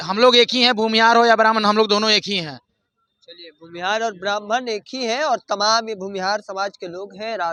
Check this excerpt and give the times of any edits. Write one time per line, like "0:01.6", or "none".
none